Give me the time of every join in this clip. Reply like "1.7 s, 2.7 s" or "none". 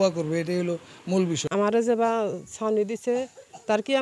1.4 s